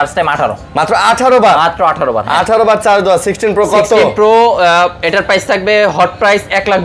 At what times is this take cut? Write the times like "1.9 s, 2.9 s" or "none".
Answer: none